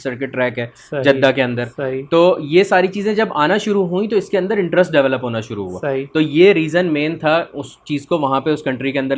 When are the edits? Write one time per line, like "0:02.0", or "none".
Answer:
none